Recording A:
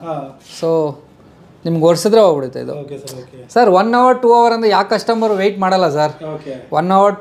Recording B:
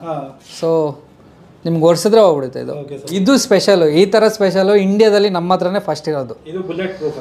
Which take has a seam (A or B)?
B